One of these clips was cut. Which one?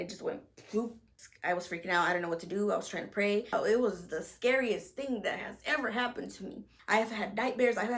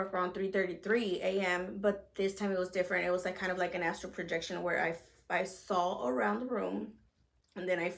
first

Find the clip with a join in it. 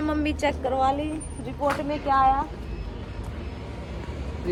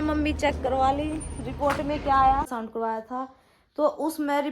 second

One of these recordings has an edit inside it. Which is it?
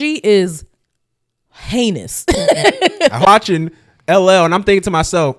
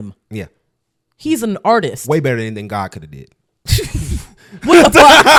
first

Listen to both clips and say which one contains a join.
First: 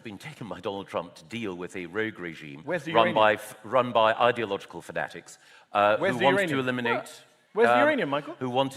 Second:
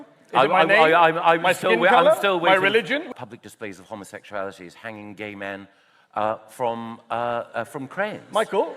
second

